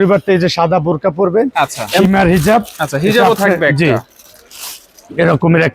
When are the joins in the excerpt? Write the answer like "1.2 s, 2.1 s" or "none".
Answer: 1.9 s